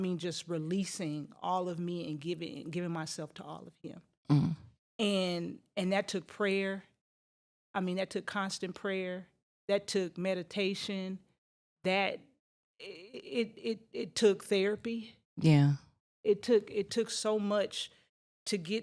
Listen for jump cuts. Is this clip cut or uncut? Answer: uncut